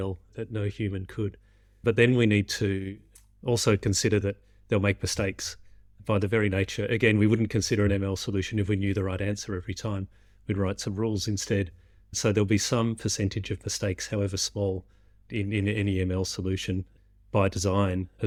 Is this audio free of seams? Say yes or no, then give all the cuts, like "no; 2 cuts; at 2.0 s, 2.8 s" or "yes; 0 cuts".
yes; 0 cuts